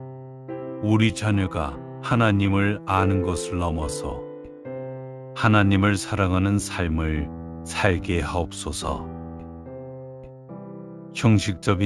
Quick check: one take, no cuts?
yes; 0 cuts

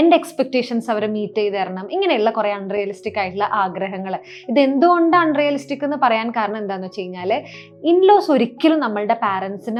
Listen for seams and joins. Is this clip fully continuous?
yes; 0 cuts

